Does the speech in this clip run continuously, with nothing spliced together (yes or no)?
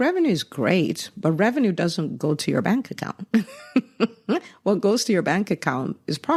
yes